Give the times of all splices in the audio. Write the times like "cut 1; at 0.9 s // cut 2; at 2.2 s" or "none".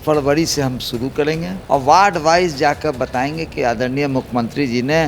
cut 1; at 1.5 s